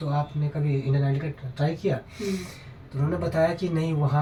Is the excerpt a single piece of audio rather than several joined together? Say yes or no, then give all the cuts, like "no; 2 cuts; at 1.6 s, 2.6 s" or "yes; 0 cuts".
yes; 0 cuts